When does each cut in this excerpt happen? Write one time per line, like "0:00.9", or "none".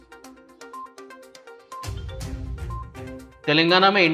0:02.2